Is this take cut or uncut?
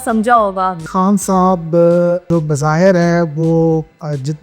cut